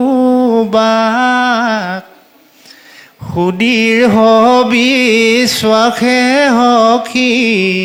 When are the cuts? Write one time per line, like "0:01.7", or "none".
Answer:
none